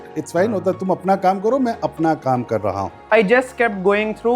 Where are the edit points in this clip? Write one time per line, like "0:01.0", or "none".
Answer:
0:02.9